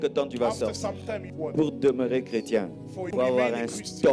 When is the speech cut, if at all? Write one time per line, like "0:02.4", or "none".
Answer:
0:01.3
0:03.1